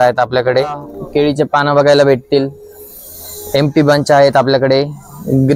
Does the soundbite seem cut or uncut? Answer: cut